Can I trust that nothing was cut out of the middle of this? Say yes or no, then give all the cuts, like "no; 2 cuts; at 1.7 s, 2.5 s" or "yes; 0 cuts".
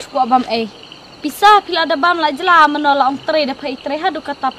yes; 0 cuts